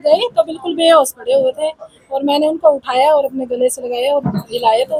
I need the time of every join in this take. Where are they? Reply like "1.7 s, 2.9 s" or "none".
none